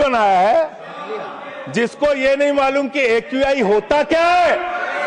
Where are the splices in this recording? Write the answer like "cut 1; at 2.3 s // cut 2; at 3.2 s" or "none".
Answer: none